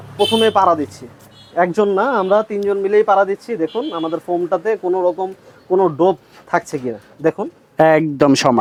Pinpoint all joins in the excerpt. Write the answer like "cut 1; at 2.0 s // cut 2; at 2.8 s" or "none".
none